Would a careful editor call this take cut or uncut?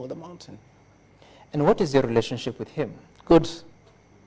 uncut